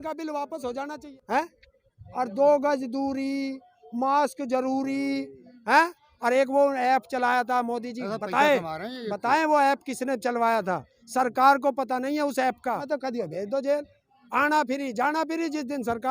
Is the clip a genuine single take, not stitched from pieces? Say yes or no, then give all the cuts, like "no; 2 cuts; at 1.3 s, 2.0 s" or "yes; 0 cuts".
no; 2 cuts; at 1.1 s, 12.8 s